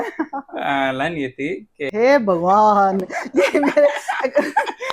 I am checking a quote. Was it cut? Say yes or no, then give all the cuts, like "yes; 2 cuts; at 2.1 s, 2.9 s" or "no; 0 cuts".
yes; 1 cut; at 1.7 s